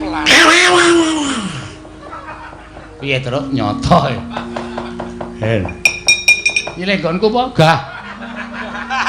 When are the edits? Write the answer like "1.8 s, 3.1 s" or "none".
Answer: none